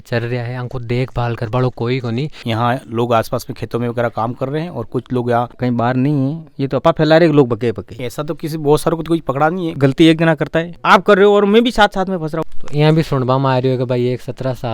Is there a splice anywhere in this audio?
yes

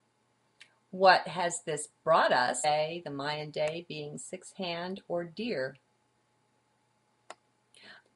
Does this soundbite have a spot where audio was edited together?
no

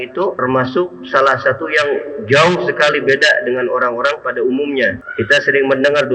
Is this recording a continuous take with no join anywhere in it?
no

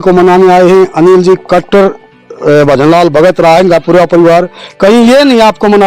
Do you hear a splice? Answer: no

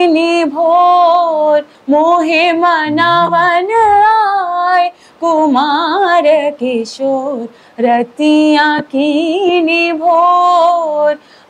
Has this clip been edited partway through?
yes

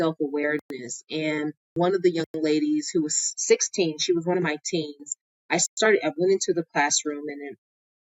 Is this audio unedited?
no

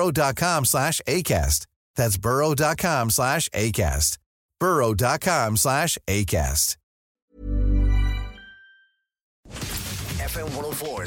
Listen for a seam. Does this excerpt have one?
yes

